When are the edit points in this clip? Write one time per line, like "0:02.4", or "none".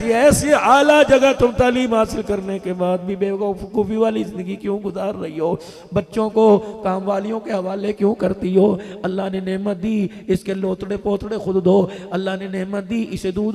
none